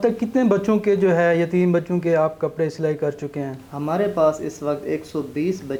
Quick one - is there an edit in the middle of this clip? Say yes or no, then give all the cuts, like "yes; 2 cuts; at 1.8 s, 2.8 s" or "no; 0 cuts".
no; 0 cuts